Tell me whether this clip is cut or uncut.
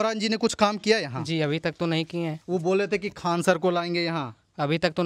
cut